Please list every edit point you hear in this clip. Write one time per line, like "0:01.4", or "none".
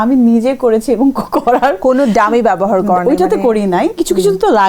none